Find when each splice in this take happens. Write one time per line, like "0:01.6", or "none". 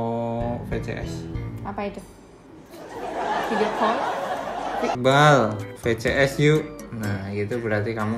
0:04.9